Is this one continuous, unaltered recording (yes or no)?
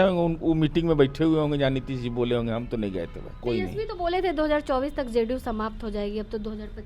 no